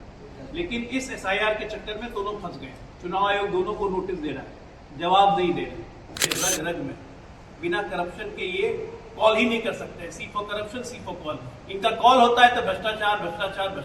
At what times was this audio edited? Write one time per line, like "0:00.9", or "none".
0:06.4